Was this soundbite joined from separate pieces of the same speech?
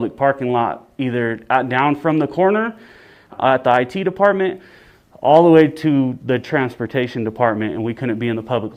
no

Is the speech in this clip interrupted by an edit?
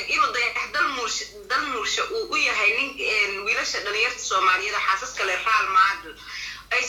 no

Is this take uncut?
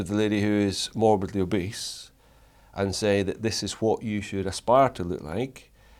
yes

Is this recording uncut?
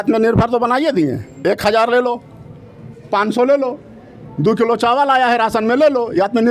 yes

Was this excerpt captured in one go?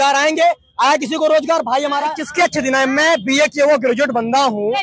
no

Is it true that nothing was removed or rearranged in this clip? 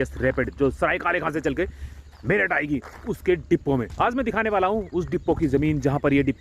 no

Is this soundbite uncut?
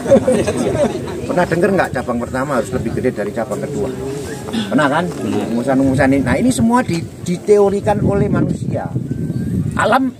no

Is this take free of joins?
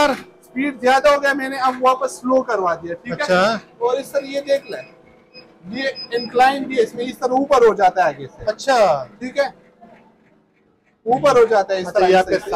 yes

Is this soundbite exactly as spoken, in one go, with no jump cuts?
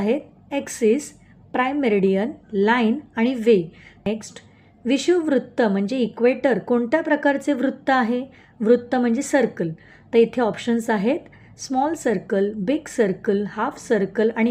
no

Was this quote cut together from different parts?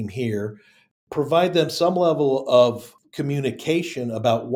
yes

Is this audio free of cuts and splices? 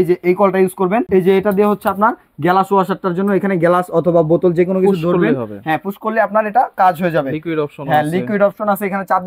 no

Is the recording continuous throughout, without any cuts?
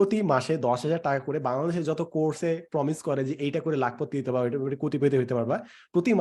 yes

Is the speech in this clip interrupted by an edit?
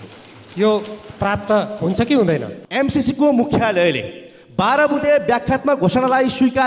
yes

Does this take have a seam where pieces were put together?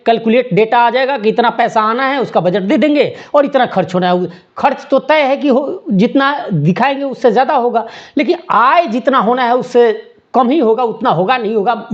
no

